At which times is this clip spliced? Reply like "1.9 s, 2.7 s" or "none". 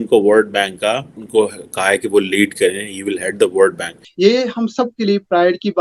1.1 s, 4.0 s